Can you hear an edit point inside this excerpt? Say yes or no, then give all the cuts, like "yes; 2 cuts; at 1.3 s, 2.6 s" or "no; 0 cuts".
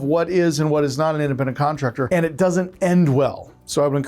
yes; 1 cut; at 2.1 s